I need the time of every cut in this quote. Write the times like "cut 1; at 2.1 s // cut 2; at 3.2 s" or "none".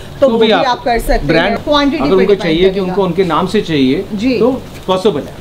cut 1; at 1.5 s